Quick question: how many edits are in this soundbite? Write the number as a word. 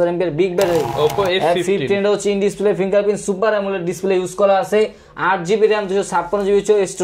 one